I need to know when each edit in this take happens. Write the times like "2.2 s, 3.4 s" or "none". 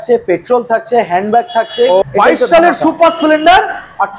2.0 s